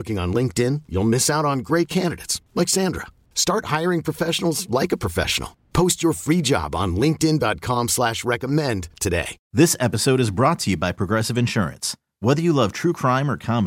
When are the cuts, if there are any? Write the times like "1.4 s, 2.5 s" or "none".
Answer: 9.3 s